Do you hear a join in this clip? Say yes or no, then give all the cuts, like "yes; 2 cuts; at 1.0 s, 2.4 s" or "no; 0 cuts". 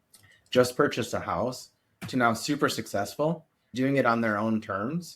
yes; 1 cut; at 3.7 s